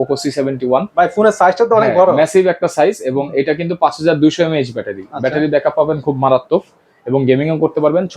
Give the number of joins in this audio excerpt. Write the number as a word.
zero